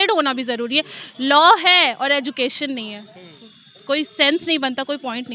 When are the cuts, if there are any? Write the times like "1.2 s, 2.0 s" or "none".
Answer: none